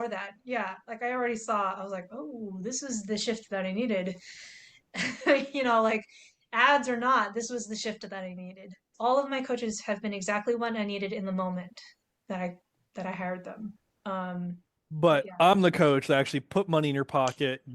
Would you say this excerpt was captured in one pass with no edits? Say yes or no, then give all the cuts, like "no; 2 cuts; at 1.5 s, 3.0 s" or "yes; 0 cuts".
no; 1 cut; at 8.9 s